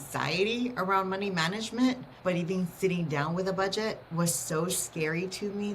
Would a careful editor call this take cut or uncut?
cut